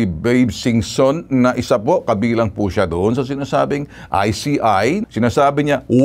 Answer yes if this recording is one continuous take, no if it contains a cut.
yes